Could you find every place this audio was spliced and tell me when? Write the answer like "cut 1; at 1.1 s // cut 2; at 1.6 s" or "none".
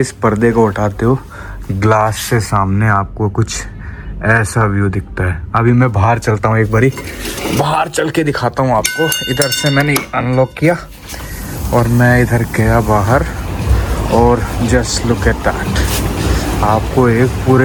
none